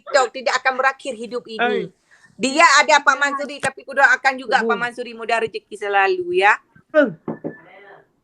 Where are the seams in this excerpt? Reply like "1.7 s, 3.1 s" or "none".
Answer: 6.9 s